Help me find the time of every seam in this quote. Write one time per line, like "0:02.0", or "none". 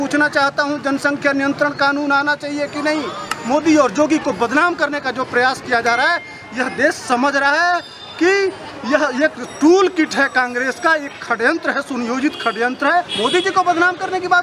0:03.3
0:13.1